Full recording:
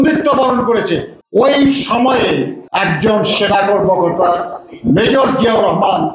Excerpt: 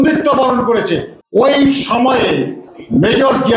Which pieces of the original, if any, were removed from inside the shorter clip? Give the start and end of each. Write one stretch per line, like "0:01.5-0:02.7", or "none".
0:02.6-0:04.6